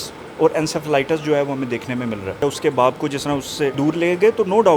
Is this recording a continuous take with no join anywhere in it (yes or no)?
no